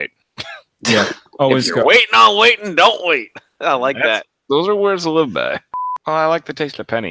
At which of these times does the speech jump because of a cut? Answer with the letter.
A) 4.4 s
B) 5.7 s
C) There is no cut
B